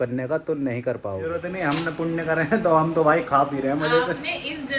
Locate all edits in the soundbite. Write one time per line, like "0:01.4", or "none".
0:01.5